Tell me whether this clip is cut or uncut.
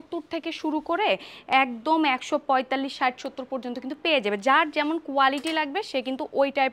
uncut